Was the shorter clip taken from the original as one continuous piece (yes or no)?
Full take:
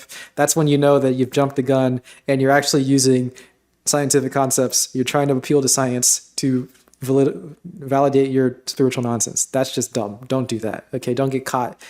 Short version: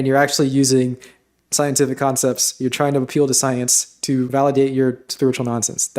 no